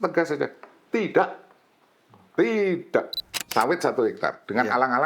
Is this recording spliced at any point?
yes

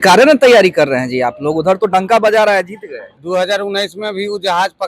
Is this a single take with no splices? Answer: no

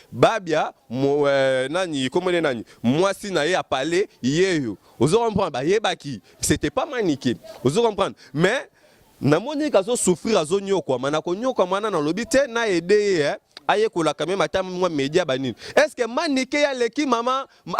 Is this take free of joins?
yes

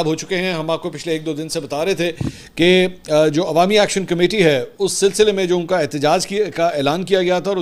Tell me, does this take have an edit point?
no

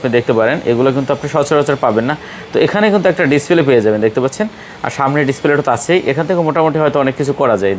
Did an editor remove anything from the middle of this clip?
no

